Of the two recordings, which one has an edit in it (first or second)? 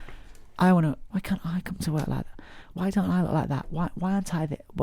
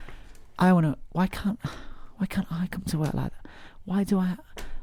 first